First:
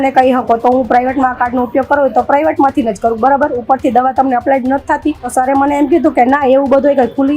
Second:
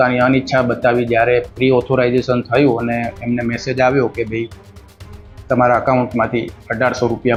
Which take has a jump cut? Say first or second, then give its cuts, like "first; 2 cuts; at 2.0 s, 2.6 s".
first; 1 cut; at 5.3 s